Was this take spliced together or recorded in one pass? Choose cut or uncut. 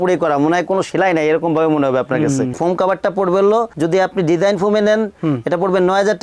cut